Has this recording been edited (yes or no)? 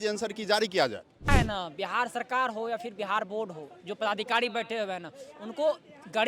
yes